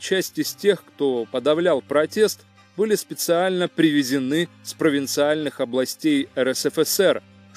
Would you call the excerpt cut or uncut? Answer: uncut